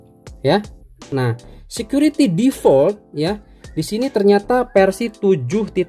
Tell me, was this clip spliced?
yes; 1 cut; at 1.1 s

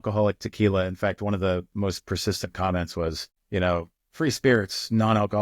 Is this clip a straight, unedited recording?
no; 2 cuts; at 3.3 s, 4.0 s

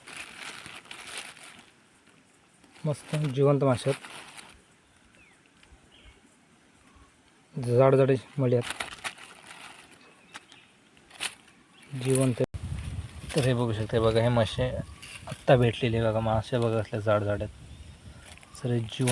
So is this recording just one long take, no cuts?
no; 1 cut; at 12.4 s

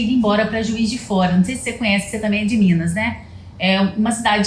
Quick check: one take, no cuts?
yes; 0 cuts

